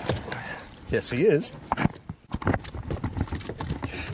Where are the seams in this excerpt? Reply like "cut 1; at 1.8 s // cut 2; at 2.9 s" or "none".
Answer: cut 1; at 2.3 s